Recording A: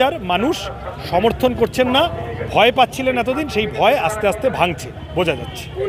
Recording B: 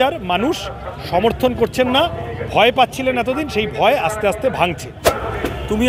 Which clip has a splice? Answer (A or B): B